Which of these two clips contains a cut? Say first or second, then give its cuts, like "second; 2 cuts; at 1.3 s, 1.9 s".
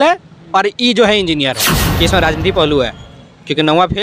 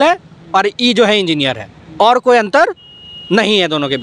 first; 1 cut; at 1.8 s